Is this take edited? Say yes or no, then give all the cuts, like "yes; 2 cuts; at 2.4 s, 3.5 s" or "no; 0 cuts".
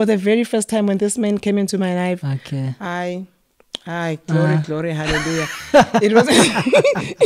no; 0 cuts